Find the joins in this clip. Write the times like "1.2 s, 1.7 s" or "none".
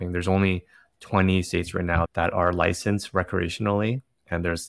2.1 s